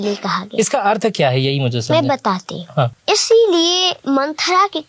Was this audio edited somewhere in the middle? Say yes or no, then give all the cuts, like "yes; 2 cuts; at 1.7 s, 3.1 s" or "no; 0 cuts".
yes; 2 cuts; at 3.0 s, 3.9 s